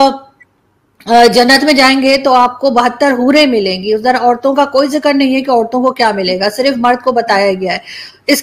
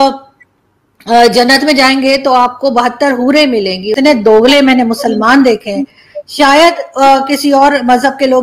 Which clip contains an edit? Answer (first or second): second